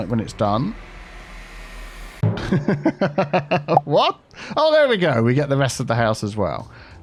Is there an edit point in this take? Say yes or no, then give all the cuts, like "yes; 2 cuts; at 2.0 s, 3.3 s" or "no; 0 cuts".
no; 0 cuts